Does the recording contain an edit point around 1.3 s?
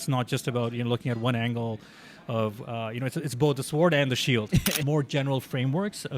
no; 1 cut; at 4.8 s

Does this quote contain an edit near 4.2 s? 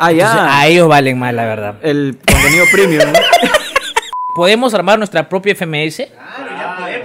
yes; 1 cut; at 4.2 s

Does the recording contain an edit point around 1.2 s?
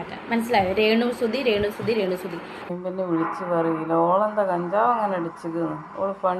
no; 1 cut; at 2.7 s

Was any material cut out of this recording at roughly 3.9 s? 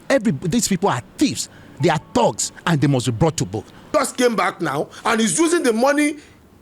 yes; 1 cut; at 3.9 s

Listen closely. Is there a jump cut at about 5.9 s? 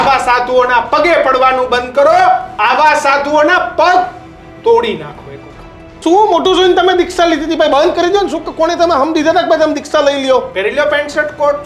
yes; 1 cut; at 5.9 s

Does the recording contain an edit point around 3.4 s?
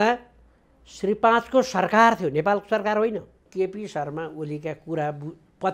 yes; 1 cut; at 3.4 s

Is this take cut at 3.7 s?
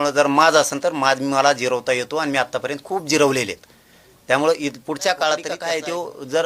no; 1 cut; at 5.5 s

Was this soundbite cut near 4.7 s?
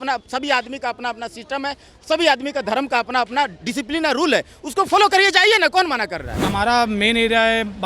no; 1 cut; at 6.3 s

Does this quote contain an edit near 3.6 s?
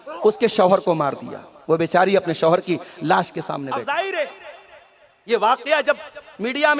yes; 1 cut; at 3.6 s

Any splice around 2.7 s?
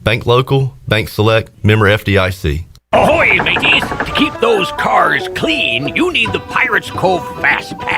yes; 1 cut; at 2.7 s

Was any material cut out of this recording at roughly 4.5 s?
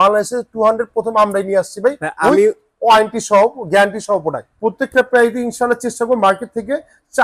yes; 1 cut; at 4.5 s

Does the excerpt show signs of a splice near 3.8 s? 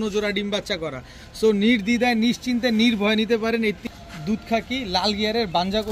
yes; 1 cut; at 3.8 s

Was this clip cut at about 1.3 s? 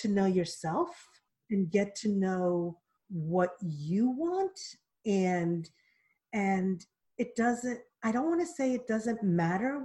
yes; 1 cut; at 1.3 s

